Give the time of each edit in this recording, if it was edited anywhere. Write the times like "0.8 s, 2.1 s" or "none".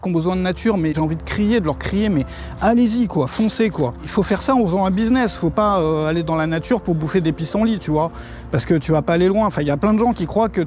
0.9 s, 4.1 s

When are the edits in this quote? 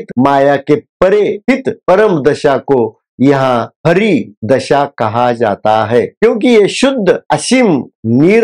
6.1 s

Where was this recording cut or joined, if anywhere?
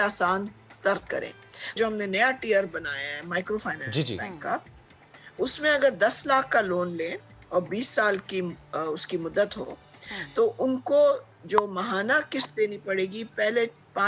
1.8 s

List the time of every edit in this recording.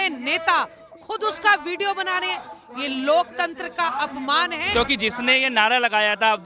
4.6 s

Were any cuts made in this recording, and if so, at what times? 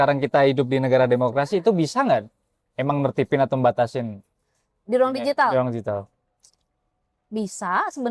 none

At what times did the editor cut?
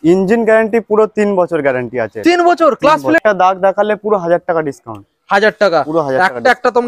3.2 s

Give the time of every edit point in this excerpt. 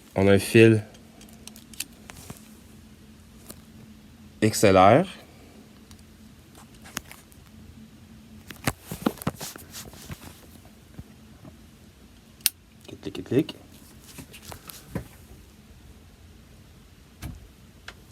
none

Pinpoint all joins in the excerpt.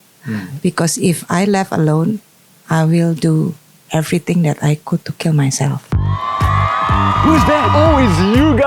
5.9 s

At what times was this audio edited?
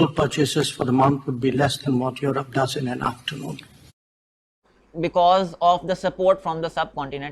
4.4 s

